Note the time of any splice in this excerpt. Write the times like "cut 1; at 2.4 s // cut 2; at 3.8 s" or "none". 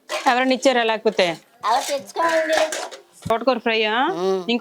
cut 1; at 1.5 s // cut 2; at 3.3 s

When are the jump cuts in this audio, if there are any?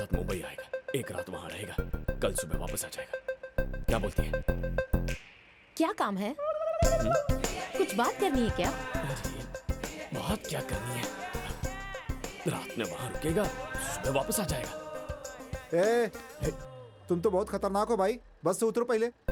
none

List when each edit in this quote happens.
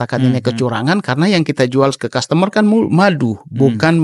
none

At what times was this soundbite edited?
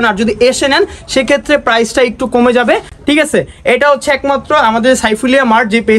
none

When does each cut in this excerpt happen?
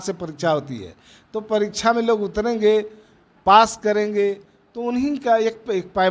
none

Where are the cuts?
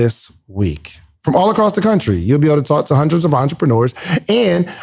none

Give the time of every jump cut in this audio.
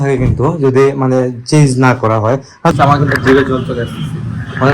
cut 1; at 2.7 s

